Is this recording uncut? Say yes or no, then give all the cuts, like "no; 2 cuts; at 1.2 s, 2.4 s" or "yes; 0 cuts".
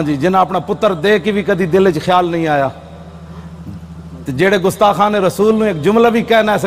yes; 0 cuts